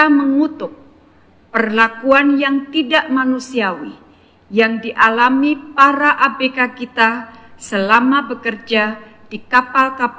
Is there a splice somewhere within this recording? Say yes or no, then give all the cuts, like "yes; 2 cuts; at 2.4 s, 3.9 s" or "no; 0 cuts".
no; 0 cuts